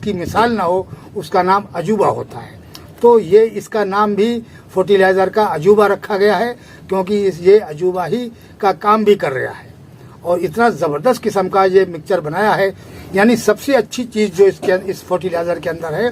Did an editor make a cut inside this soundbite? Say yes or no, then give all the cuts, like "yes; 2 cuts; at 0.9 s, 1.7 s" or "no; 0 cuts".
yes; 1 cut; at 12.9 s